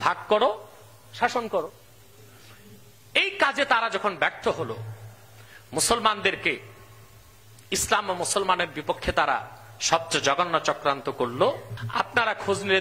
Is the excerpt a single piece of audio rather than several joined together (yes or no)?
no